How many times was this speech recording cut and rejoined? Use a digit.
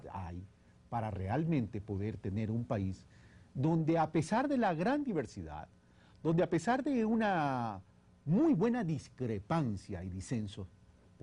1